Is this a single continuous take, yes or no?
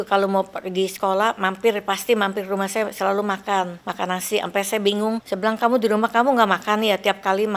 no